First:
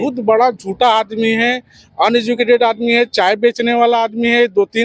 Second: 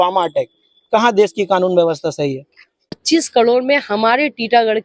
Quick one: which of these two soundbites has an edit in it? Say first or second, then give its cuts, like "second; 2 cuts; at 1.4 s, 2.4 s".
second; 1 cut; at 3.0 s